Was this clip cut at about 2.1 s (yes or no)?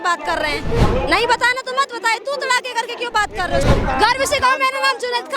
no